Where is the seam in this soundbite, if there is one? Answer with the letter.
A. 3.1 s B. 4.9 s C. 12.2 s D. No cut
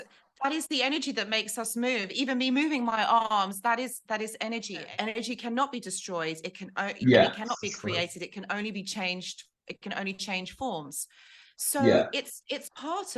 B